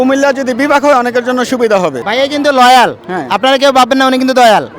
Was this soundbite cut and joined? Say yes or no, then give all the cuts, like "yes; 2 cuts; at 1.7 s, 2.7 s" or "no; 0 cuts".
yes; 1 cut; at 2.0 s